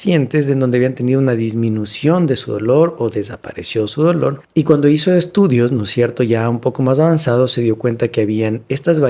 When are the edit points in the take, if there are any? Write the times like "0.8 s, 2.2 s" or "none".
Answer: 4.4 s